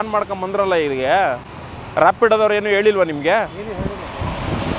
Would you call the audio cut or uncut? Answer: uncut